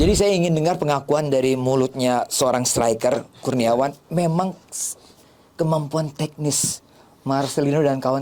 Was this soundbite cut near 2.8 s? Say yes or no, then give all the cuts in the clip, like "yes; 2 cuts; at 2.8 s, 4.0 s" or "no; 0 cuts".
no; 0 cuts